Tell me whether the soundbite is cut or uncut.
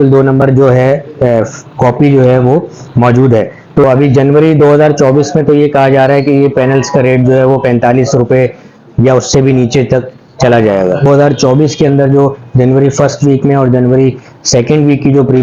cut